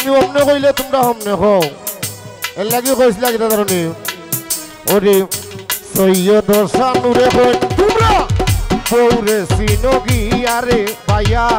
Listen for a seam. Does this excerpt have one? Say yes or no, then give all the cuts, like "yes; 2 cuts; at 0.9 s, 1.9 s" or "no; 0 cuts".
no; 0 cuts